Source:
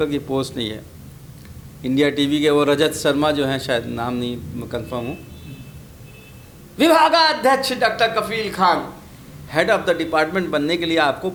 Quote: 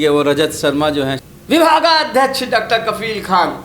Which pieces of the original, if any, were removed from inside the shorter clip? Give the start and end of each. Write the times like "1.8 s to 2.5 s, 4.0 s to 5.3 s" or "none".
3.6 s to 6.5 s